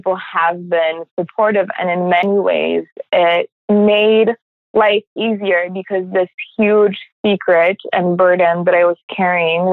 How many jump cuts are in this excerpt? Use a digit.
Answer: 2